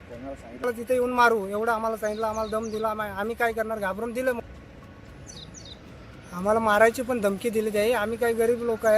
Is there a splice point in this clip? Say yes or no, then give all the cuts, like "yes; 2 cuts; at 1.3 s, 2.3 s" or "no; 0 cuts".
yes; 1 cut; at 4.3 s